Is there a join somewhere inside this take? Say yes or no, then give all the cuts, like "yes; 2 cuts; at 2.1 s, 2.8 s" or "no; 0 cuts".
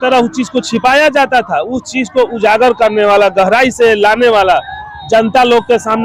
no; 0 cuts